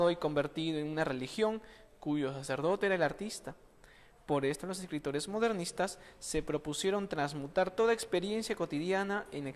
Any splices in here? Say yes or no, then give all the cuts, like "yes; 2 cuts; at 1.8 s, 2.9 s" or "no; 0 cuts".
yes; 1 cut; at 4.6 s